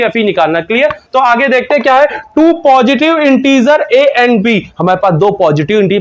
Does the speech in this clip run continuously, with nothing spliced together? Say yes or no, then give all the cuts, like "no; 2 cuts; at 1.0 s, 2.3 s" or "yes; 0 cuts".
yes; 0 cuts